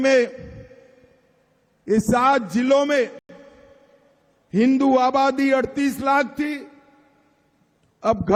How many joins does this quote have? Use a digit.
0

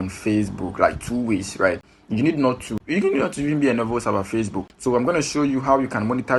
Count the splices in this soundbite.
2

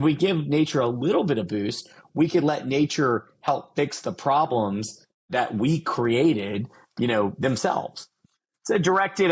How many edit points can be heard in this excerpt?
3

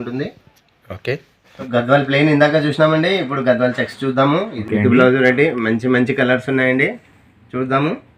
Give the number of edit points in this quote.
2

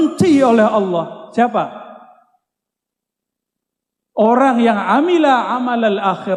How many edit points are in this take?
0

